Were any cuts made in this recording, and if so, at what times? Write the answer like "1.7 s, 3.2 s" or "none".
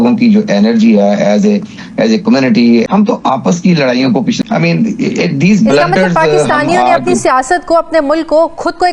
2.8 s, 4.4 s